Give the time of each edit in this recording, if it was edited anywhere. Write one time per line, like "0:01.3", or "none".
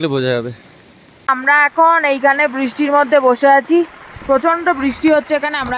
0:01.3